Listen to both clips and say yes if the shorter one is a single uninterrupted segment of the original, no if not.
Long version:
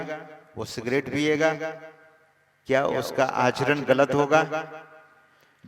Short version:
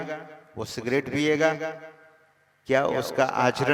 yes